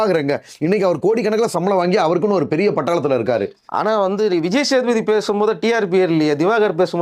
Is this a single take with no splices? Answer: yes; 0 cuts

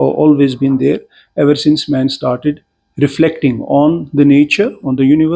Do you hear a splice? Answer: no; 0 cuts

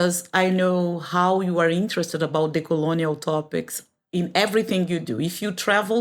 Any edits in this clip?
no; 0 cuts

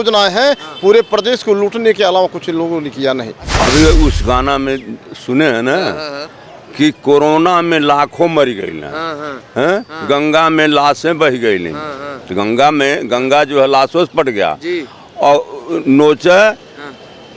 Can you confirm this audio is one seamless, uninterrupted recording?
no; 1 cut; at 3.4 s

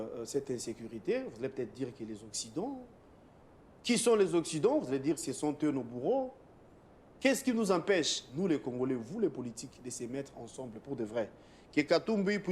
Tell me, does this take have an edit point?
no; 0 cuts

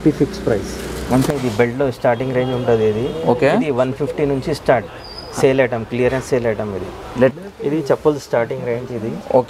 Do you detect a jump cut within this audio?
yes; 2 cuts; at 1.3 s, 7.3 s

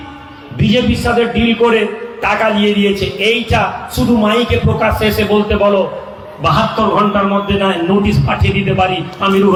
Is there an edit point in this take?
no; 0 cuts

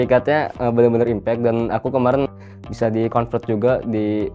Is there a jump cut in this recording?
yes; 1 cut; at 2.3 s

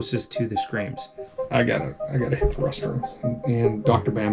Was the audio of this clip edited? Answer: yes; 1 cut; at 1.3 s

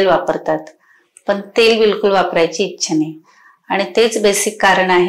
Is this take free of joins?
yes; 0 cuts

